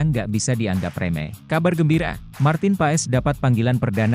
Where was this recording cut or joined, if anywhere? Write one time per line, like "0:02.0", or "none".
0:01.4
0:02.2